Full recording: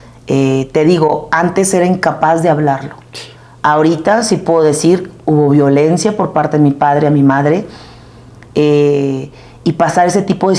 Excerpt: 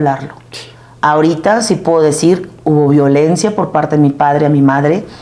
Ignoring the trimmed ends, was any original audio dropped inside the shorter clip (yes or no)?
no